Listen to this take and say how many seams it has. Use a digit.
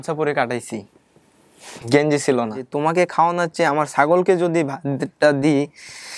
1